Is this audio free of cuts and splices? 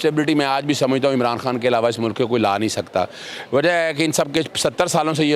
yes; 0 cuts

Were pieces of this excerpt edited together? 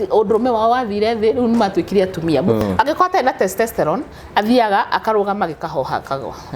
yes; 1 cut; at 2.6 s

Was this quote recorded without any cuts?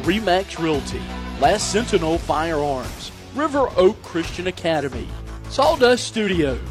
yes; 0 cuts

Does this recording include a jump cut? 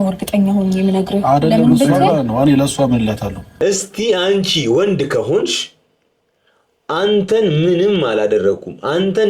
yes; 1 cut; at 3.4 s

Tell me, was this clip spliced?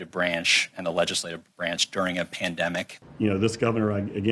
yes; 1 cut; at 3.0 s

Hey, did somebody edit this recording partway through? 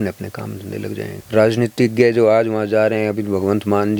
no; 0 cuts

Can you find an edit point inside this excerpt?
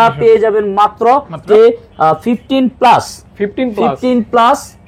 yes; 1 cut; at 1.4 s

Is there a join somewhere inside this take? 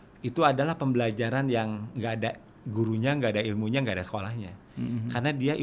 no; 0 cuts

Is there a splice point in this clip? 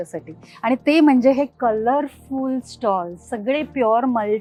no; 0 cuts

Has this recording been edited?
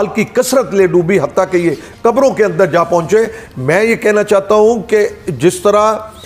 no; 0 cuts

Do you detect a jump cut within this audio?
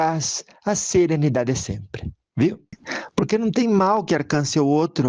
yes; 1 cut; at 2.8 s

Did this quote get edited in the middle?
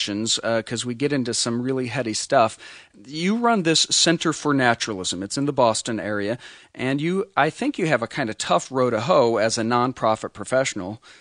no; 0 cuts

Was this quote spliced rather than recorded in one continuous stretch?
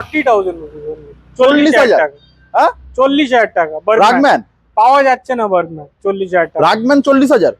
no; 0 cuts

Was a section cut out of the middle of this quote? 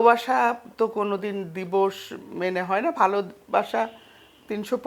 no; 0 cuts

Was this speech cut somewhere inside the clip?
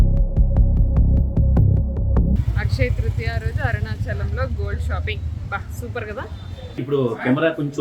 yes; 2 cuts; at 2.4 s, 6.8 s

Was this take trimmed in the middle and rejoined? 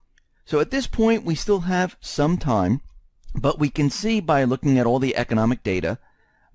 yes; 1 cut; at 5.6 s

